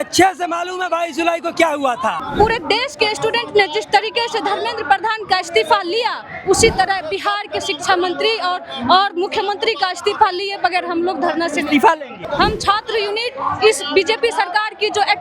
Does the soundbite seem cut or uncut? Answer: cut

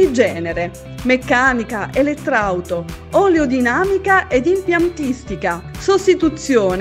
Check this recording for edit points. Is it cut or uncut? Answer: cut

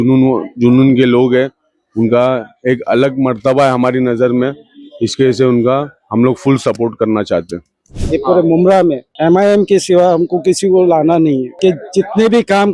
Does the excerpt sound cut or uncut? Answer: cut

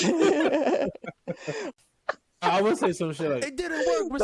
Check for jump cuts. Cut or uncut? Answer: cut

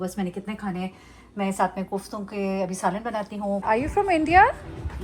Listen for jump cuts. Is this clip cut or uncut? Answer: cut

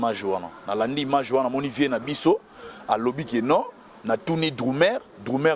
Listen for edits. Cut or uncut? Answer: uncut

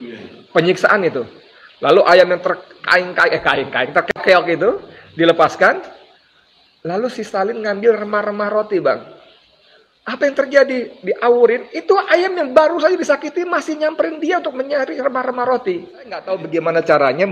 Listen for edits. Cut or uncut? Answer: cut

